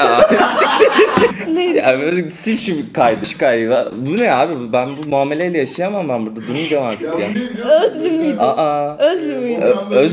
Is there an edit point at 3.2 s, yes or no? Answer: yes